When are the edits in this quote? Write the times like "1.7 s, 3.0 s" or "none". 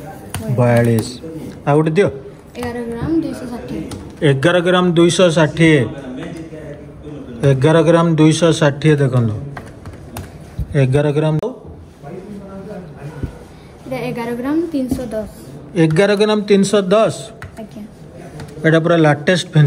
11.4 s